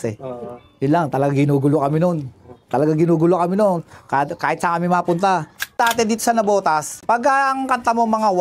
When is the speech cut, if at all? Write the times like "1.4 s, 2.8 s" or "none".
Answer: none